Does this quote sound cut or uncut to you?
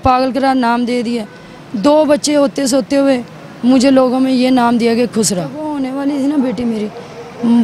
cut